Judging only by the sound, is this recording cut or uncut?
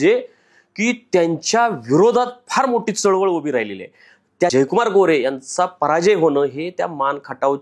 cut